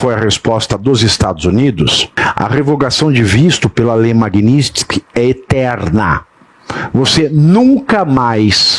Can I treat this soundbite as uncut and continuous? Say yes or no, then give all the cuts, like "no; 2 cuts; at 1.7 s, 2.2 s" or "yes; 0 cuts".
no; 1 cut; at 2.1 s